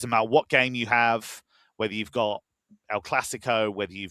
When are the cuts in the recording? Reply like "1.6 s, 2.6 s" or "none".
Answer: none